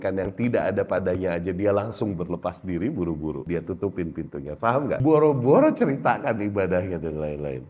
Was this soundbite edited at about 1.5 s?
no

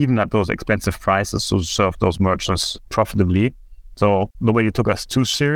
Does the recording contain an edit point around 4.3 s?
yes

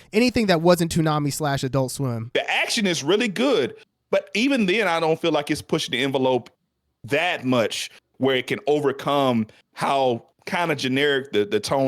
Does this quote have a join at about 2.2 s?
yes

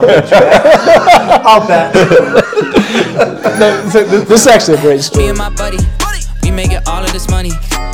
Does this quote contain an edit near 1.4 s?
no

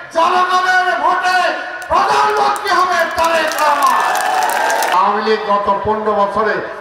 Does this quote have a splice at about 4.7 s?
yes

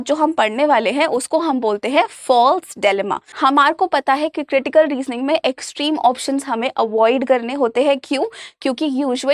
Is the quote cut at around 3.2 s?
yes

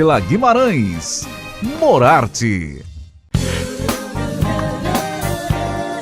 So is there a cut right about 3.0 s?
yes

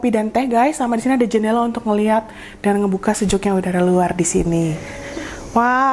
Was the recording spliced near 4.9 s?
yes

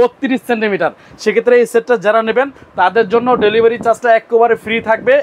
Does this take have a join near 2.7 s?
no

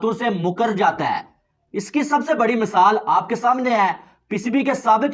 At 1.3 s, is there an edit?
no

